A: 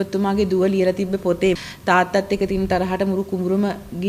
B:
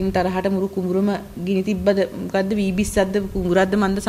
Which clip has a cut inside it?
A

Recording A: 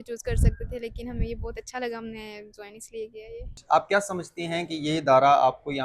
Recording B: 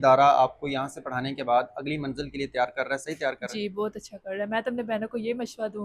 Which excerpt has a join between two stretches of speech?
A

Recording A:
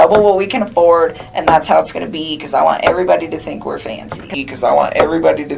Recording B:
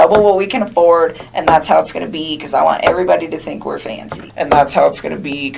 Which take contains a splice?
A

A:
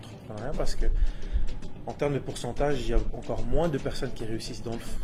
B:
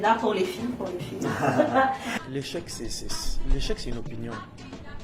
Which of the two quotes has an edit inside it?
B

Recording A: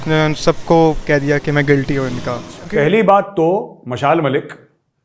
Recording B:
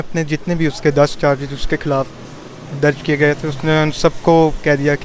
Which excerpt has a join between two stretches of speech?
A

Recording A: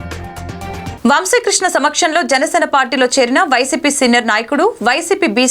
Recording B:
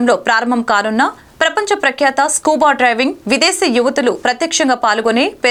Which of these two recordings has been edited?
A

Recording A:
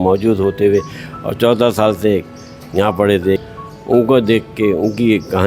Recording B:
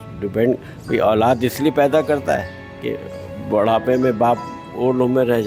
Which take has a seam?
A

